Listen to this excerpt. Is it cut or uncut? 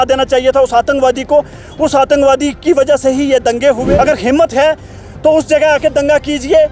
cut